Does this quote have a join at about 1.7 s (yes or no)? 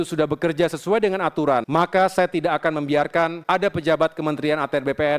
yes